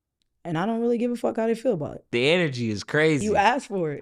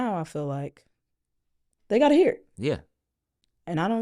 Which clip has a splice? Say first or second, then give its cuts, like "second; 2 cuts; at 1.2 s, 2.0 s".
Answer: first; 1 cut; at 2.0 s